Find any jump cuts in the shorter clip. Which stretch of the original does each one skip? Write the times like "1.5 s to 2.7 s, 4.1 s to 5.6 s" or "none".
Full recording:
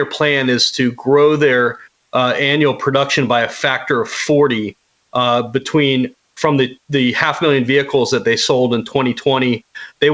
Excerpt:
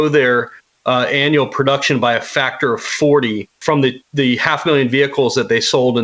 4.8 s to 6.2 s

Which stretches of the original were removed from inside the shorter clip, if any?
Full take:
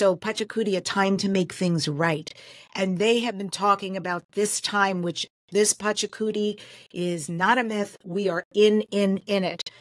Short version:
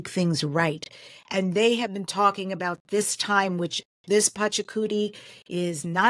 none

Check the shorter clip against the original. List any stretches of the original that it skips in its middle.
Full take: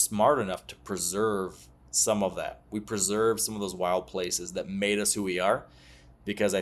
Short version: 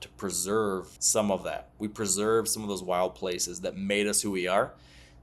1.6 s to 1.9 s

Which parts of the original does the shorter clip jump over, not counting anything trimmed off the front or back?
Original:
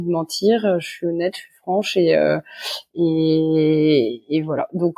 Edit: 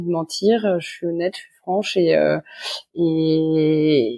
none

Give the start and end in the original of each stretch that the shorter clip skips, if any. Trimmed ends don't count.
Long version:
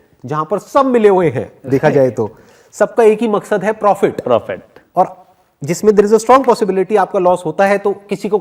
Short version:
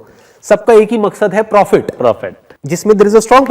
4.3 s to 5.0 s

